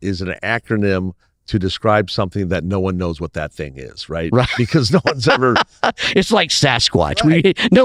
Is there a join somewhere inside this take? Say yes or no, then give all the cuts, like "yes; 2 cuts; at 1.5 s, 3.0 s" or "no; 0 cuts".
no; 0 cuts